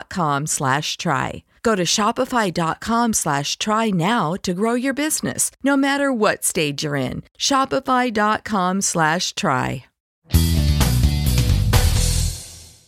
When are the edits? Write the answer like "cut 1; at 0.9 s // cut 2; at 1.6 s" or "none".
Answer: cut 1; at 10.0 s